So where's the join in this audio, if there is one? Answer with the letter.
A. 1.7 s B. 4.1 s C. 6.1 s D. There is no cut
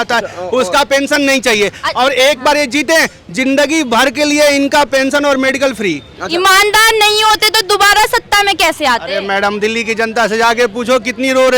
D